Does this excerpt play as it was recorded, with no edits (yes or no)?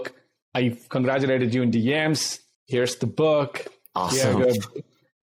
yes